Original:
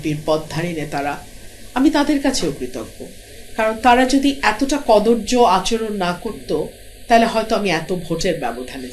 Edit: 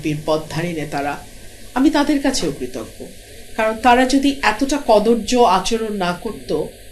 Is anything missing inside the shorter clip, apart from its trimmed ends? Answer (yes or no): no